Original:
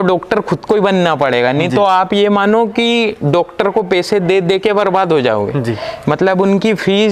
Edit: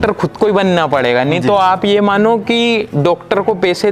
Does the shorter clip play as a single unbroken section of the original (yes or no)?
yes